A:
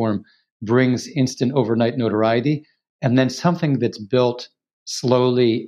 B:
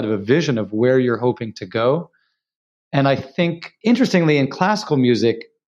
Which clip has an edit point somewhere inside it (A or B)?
B